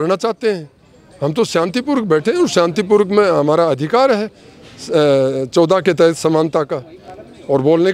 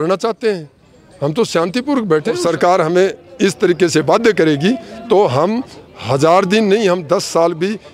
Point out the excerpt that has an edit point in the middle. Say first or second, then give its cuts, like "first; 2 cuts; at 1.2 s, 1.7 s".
second; 1 cut; at 2.4 s